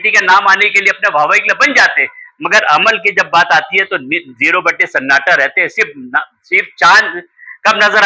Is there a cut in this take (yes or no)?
no